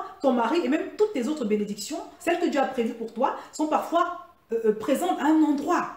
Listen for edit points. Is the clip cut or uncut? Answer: cut